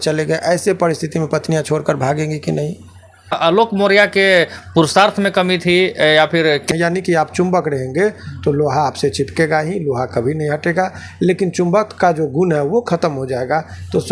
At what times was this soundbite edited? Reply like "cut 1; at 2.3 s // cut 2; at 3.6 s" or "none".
cut 1; at 3.4 s // cut 2; at 6.7 s

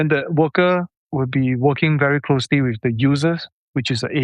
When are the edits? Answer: cut 1; at 1.0 s

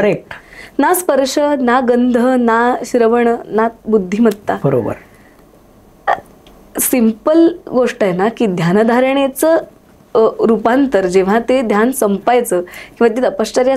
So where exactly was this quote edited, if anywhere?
none

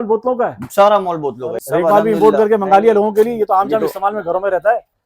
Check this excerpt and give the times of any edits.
cut 1; at 1.6 s

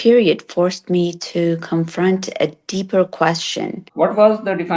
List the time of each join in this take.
cut 1; at 3.8 s

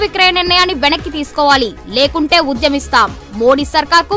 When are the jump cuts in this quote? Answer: none

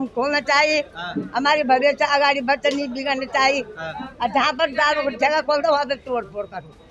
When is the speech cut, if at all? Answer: none

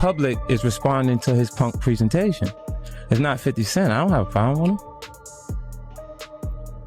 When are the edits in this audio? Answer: none

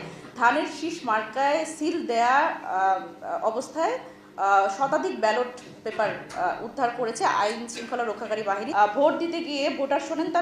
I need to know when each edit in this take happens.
cut 1; at 8.7 s

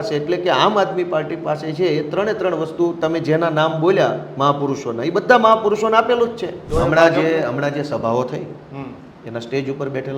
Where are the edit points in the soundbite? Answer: cut 1; at 6.6 s

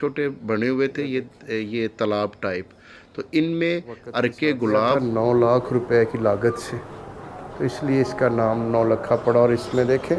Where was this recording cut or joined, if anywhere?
cut 1; at 5.0 s

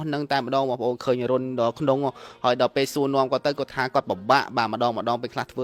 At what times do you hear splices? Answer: none

